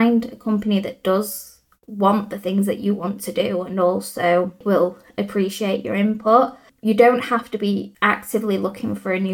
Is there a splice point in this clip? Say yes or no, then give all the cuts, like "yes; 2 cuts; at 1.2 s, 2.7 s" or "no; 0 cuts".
yes; 3 cuts; at 4.6 s, 6.7 s, 7.9 s